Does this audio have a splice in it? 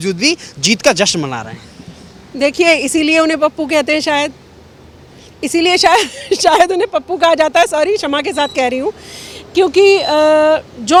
no; 0 cuts

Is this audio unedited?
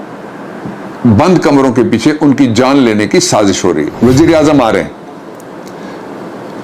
no; 1 cut; at 3.9 s

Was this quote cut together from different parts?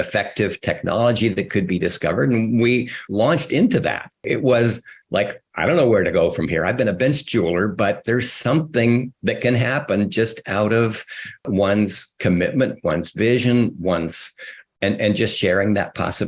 yes; 2 cuts; at 4.2 s, 11.4 s

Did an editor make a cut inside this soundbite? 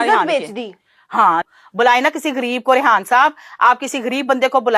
yes; 1 cut; at 1.4 s

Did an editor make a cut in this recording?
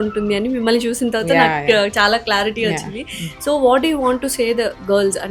no; 0 cuts

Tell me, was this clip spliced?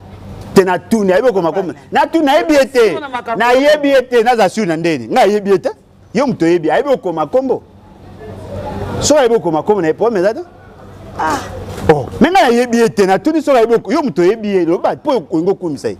no; 0 cuts

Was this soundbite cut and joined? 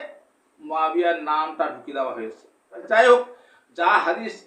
yes; 1 cut; at 2.8 s

